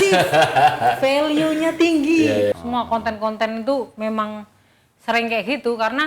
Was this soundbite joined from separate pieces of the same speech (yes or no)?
yes